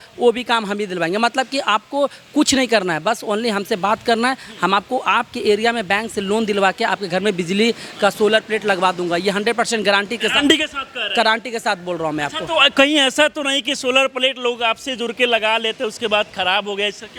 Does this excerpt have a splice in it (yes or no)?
no